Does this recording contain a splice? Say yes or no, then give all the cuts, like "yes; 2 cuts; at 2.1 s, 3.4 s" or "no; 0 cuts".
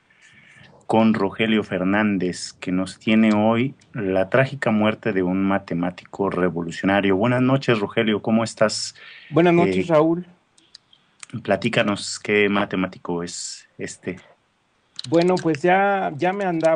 no; 0 cuts